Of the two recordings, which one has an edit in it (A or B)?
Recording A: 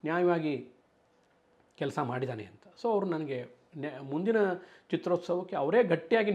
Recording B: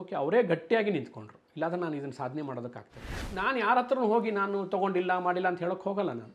B